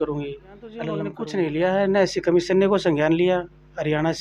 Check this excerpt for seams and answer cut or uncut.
cut